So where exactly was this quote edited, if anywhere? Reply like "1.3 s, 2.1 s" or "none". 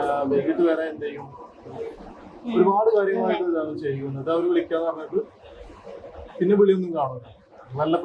none